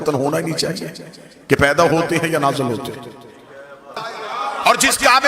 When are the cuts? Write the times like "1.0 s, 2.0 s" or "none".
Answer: 3.9 s

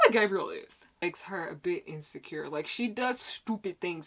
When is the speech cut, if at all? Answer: 1.0 s

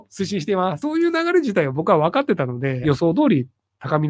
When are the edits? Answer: 0.8 s, 2.8 s

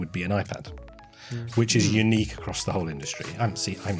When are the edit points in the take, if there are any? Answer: none

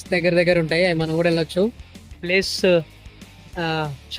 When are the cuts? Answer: 2.1 s

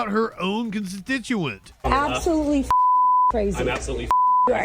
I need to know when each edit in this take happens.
1.6 s

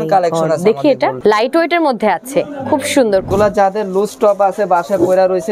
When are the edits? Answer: 1.2 s, 3.3 s

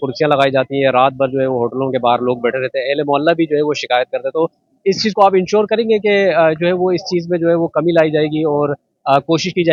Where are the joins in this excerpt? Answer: none

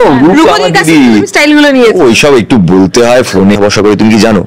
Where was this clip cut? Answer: 3.6 s

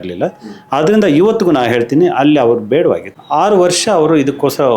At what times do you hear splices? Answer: 3.1 s

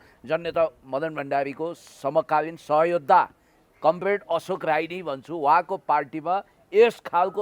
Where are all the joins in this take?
none

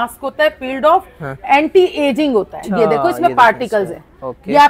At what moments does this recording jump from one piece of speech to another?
2.6 s

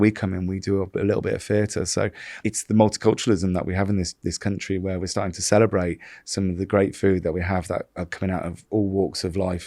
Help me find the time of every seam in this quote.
2.3 s

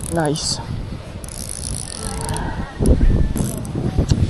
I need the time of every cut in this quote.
3.4 s

